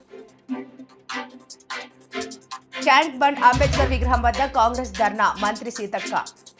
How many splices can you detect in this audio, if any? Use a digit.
1